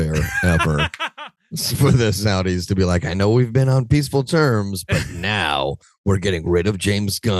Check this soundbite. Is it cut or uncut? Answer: uncut